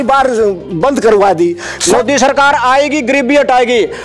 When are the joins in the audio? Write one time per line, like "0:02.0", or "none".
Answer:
0:01.8